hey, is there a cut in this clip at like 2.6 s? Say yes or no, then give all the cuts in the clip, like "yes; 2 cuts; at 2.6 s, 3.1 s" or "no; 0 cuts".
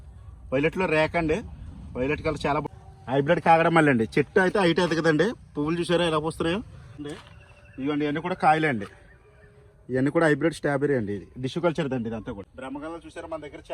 yes; 3 cuts; at 2.6 s, 6.9 s, 12.5 s